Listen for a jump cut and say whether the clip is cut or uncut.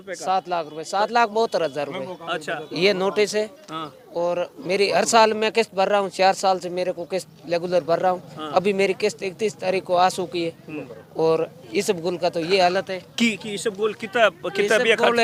uncut